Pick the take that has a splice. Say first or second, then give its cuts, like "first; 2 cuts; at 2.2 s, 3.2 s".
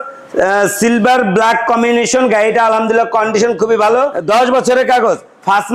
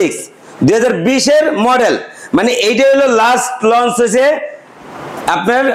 first; 1 cut; at 4.2 s